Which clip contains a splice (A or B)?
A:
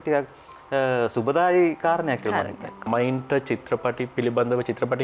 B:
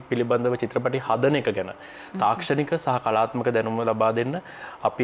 A